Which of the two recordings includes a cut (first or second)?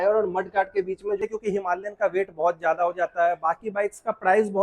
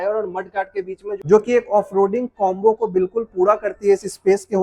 first